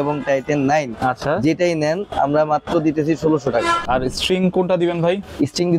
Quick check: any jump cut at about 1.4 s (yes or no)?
no